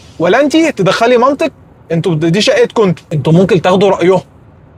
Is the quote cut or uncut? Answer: cut